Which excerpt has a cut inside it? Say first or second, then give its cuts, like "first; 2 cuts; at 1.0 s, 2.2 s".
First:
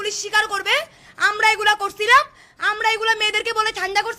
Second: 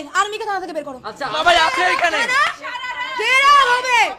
second; 1 cut; at 1.4 s